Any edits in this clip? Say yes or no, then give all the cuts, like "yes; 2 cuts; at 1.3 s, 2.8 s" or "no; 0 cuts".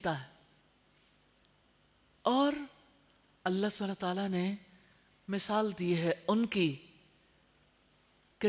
no; 0 cuts